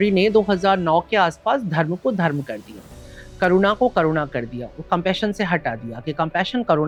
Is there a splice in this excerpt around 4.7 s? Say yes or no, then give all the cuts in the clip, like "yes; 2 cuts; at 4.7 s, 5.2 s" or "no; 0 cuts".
no; 0 cuts